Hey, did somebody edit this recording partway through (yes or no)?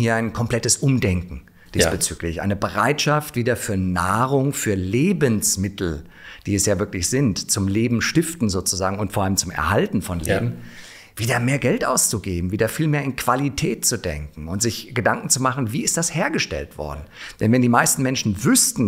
no